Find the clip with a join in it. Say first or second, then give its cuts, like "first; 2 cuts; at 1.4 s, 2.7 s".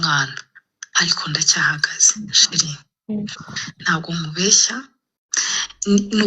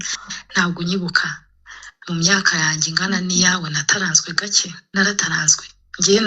second; 1 cut; at 4.9 s